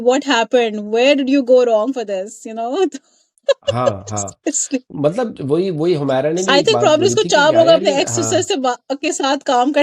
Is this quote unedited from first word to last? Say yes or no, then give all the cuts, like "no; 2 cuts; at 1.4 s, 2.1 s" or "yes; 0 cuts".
yes; 0 cuts